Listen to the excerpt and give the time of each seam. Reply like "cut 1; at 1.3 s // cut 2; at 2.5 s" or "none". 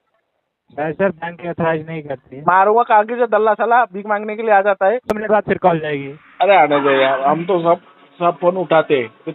cut 1; at 5.1 s